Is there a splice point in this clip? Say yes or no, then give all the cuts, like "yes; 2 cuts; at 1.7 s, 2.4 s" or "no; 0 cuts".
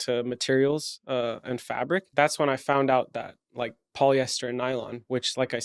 yes; 1 cut; at 2.1 s